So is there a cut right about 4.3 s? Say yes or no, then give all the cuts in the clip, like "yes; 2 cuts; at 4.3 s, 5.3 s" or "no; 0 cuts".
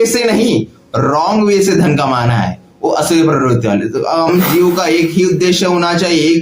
yes; 1 cut; at 4.3 s